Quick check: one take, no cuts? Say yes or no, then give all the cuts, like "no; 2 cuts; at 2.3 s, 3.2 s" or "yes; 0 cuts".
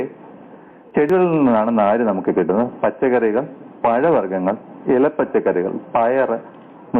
no; 1 cut; at 1.0 s